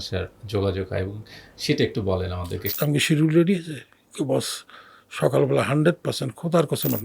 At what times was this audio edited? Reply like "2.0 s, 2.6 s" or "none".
2.6 s